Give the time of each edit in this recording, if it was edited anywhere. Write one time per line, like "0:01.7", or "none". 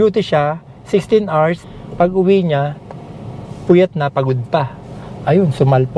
0:01.6